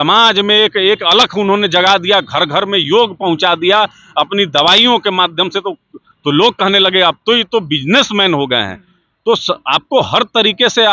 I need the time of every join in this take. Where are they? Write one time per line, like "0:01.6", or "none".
none

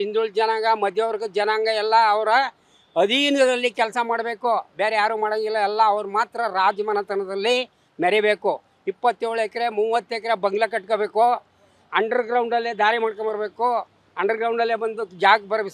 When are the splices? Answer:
none

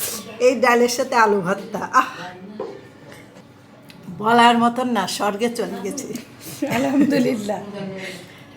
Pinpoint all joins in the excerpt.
none

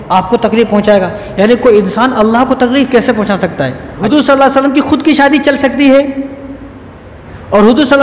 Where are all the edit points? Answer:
0:03.9

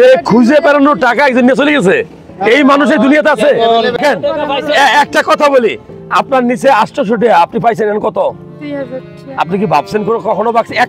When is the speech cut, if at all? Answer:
0:04.0

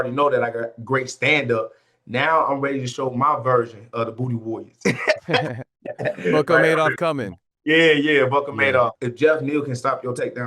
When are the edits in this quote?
0:09.0

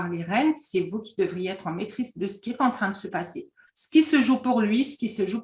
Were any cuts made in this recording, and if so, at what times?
0:03.6

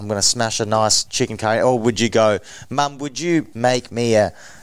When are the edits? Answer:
0:01.0
0:03.5

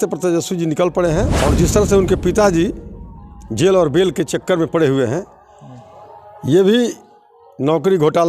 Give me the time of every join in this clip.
0:01.3

